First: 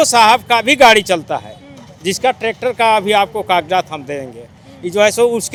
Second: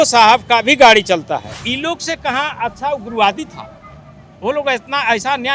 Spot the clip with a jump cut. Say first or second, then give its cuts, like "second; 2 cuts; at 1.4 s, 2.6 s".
second; 1 cut; at 1.6 s